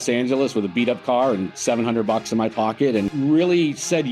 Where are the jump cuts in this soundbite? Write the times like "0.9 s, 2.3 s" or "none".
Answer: 3.1 s